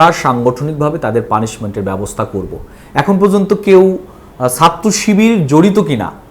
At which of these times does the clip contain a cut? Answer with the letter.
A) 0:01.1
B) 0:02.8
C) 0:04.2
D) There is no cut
D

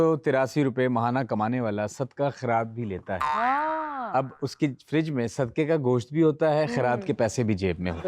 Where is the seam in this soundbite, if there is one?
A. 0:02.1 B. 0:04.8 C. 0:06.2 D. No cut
D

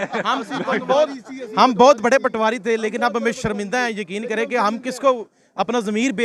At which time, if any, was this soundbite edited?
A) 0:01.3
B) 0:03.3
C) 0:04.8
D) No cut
D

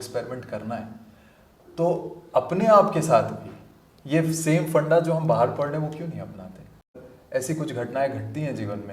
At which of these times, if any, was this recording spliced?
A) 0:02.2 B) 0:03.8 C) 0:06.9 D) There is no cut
C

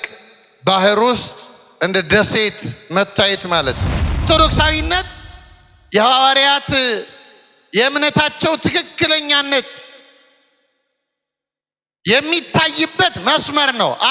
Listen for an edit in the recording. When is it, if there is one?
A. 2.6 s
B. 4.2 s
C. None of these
B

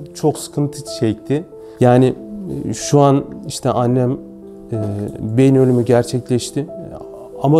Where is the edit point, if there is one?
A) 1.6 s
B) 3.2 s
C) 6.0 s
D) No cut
A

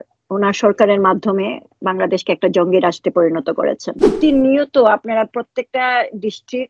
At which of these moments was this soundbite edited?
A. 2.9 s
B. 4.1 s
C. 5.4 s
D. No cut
B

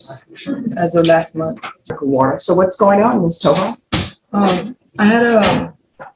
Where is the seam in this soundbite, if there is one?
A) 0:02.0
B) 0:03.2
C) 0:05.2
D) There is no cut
A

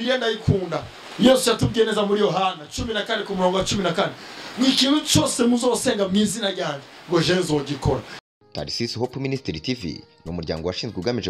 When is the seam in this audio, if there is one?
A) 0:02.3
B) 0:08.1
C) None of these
B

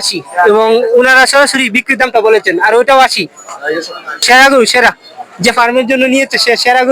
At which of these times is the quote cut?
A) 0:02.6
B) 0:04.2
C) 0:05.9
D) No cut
B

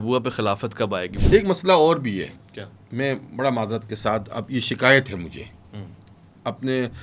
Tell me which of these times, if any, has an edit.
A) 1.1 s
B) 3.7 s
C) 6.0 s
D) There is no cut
A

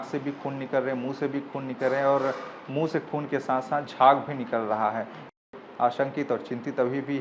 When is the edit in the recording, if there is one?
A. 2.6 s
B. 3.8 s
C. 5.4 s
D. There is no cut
C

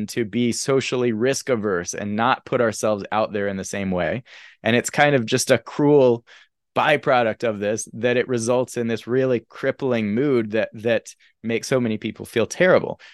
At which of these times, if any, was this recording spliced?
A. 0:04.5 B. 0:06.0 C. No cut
C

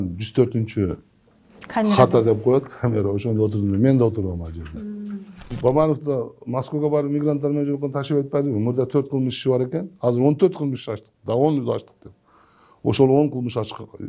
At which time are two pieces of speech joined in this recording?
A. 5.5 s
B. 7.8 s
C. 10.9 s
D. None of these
A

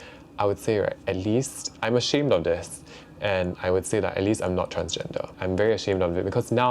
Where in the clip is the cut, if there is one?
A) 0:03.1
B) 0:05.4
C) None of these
B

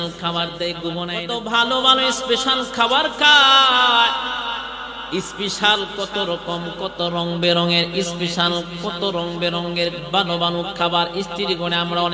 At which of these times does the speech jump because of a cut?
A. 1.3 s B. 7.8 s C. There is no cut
A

